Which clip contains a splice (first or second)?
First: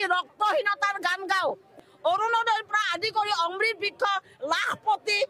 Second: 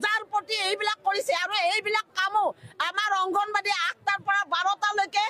first